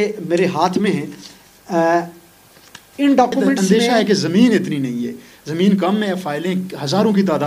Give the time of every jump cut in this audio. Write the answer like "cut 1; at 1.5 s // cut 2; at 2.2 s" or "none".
cut 1; at 3.6 s

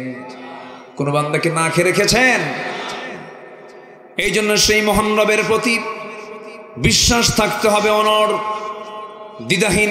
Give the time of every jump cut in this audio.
cut 1; at 3.9 s

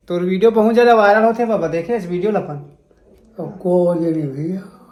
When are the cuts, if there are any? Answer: none

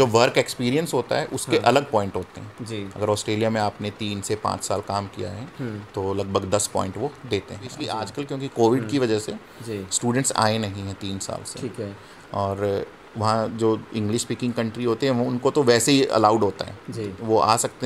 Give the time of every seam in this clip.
cut 1; at 8.1 s

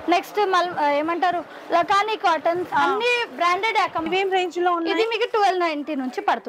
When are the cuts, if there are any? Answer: cut 1; at 4.1 s

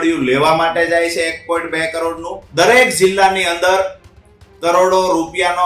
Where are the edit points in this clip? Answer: cut 1; at 2.4 s

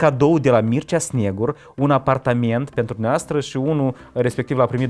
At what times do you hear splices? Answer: none

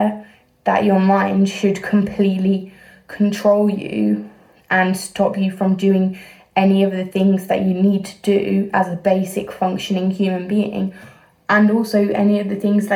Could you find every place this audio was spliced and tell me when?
none

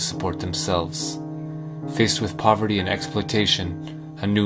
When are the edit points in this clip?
cut 1; at 2.3 s

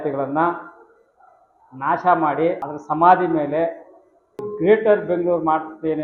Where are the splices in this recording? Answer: cut 1; at 2.7 s // cut 2; at 4.5 s

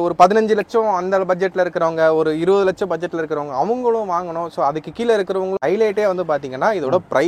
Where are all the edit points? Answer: cut 1; at 5.6 s

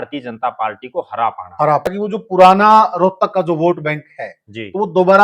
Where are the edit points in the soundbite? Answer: cut 1; at 1.9 s

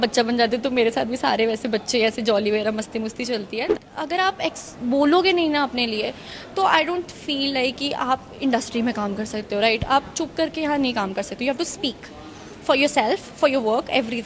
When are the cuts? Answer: cut 1; at 3.6 s

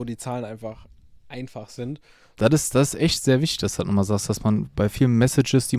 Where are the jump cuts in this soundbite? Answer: cut 1; at 2.2 s

